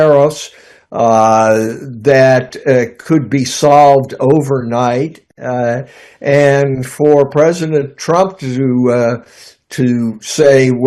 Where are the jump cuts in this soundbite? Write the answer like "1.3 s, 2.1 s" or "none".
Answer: none